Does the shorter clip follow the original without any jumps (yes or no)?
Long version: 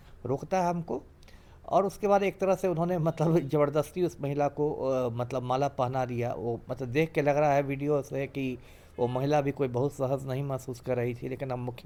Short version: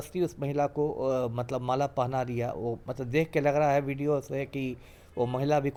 yes